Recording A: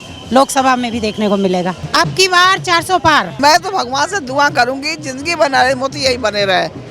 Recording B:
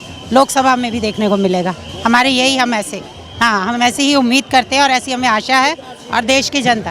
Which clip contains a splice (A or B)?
A